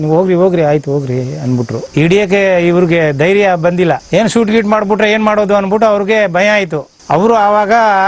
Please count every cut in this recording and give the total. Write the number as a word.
one